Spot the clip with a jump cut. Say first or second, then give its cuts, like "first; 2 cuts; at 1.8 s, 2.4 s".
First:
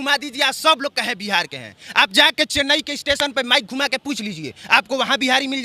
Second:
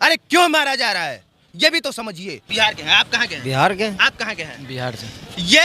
second; 1 cut; at 2.4 s